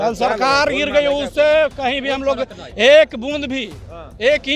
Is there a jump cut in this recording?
no; 0 cuts

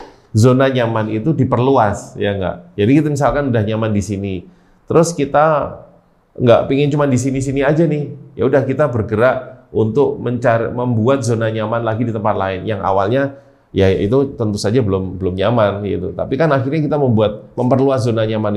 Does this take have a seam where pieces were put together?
no; 0 cuts

